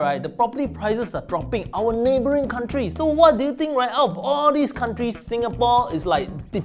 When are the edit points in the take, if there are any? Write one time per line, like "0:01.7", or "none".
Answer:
none